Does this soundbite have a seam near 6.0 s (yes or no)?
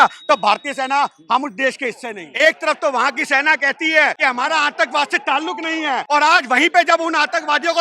yes